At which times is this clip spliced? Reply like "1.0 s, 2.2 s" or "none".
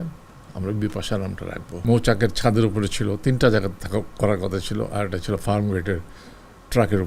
1.7 s

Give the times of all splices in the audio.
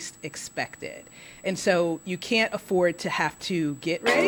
none

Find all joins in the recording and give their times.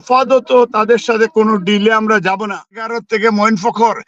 3.0 s

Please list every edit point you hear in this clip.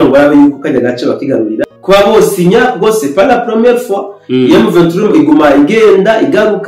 1.7 s

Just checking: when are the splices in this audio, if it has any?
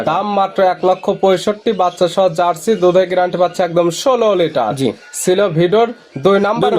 none

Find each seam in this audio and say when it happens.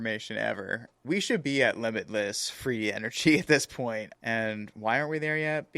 0.9 s, 4.1 s

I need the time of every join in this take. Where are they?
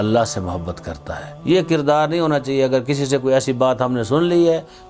1.3 s

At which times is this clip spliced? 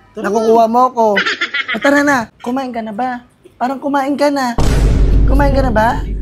2.3 s

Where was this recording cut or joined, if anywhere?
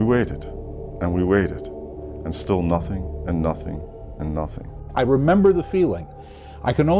4.9 s

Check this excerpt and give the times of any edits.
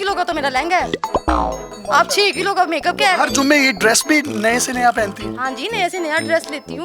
none

